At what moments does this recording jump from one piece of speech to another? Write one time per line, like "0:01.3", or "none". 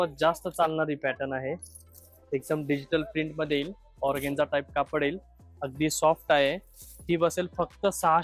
none